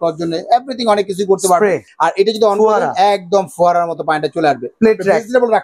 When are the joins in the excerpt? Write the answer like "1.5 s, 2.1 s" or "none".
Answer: 1.9 s, 4.6 s